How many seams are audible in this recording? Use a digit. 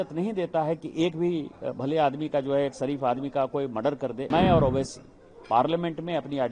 1